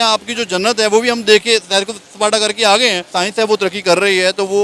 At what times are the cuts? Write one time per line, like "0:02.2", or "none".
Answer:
0:03.1